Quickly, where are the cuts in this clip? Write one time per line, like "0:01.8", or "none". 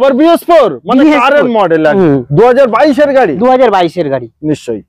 0:02.0